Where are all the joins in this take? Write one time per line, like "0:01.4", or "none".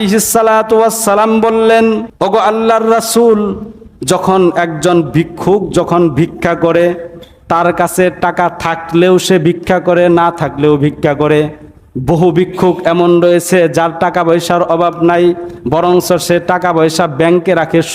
0:02.1